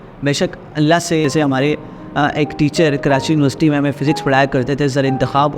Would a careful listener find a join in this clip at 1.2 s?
yes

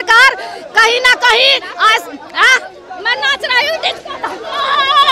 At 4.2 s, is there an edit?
no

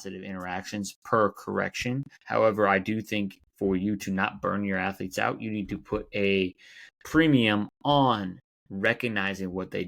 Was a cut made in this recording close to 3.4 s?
yes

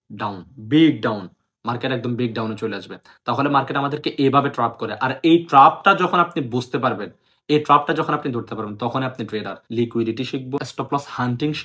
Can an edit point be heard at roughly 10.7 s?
yes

